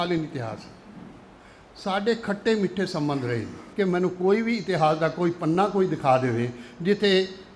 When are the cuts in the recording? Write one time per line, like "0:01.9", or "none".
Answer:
0:03.6

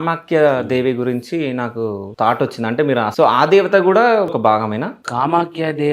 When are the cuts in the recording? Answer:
0:02.0
0:03.1
0:04.6

